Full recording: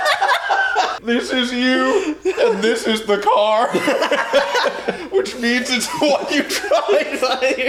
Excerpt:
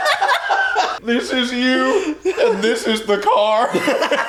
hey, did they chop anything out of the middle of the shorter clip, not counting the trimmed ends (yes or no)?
no